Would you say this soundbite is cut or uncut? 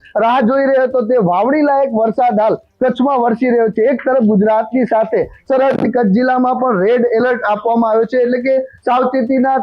uncut